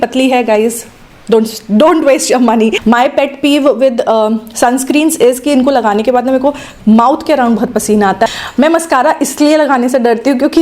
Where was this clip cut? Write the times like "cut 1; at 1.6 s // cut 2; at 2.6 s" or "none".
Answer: cut 1; at 2.8 s // cut 2; at 8.2 s